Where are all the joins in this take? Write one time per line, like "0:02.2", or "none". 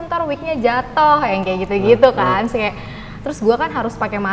none